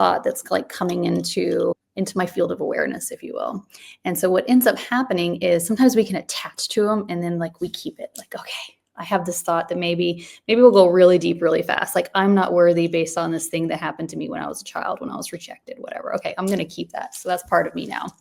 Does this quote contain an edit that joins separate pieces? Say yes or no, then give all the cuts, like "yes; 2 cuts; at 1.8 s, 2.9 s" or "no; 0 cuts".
yes; 1 cut; at 1.8 s